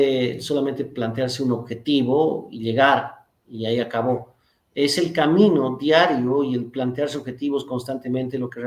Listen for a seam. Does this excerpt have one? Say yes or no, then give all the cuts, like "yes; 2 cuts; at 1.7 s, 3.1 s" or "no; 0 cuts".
no; 0 cuts